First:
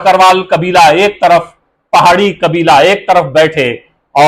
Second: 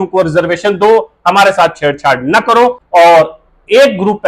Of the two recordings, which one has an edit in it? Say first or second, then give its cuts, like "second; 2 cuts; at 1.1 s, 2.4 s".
second; 1 cut; at 2.8 s